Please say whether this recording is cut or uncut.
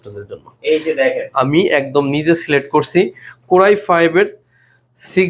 uncut